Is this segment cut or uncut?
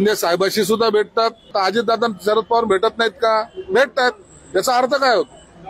cut